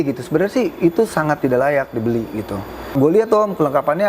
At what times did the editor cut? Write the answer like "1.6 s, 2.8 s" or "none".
2.9 s